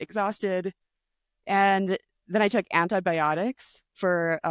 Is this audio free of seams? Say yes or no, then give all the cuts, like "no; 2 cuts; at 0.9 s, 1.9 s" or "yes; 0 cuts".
yes; 0 cuts